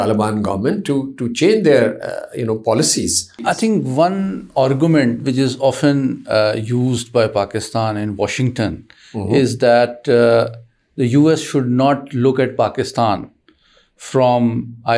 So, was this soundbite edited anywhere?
yes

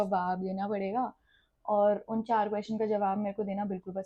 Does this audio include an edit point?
no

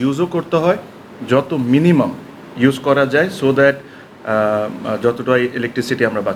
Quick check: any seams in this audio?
no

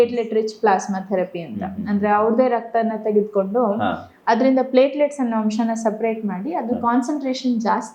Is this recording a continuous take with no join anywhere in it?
yes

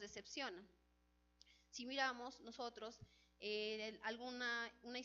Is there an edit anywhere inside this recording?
yes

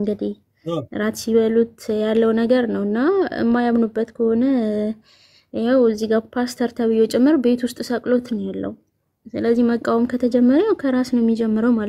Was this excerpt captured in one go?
yes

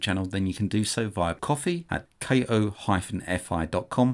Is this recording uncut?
no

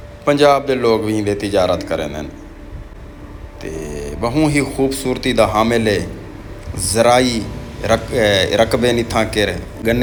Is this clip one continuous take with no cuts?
yes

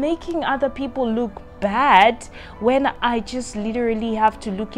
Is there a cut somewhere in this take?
no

